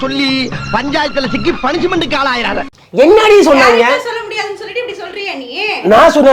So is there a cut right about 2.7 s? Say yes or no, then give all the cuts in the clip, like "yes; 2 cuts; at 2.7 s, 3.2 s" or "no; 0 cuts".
yes; 1 cut; at 2.7 s